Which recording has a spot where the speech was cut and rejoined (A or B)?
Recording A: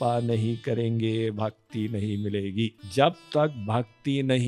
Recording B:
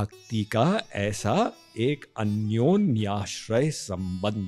A